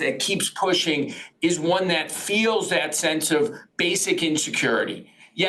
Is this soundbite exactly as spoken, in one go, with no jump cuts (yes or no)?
yes